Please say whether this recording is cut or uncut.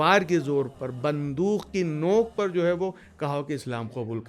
uncut